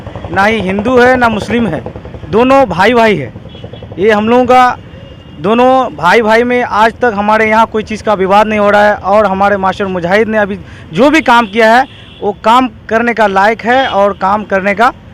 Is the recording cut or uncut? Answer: uncut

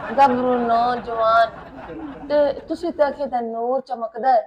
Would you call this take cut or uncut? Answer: uncut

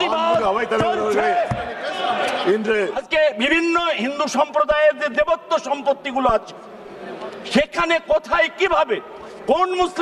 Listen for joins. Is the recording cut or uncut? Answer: cut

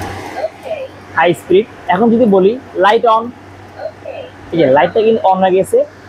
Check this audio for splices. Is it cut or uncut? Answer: uncut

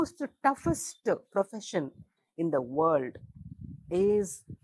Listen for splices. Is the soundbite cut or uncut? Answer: uncut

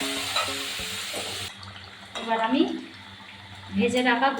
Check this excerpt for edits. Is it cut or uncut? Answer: cut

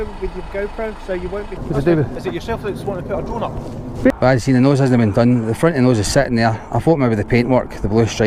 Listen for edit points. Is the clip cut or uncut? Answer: cut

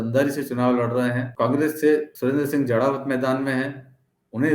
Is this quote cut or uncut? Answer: cut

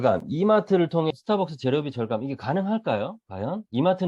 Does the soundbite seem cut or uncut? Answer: cut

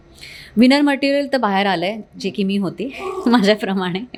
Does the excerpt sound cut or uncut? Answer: uncut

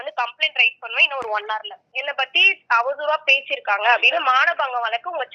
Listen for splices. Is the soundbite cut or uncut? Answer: cut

